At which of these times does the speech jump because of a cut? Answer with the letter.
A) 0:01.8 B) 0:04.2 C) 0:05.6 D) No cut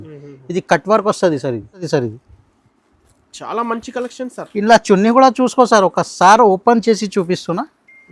A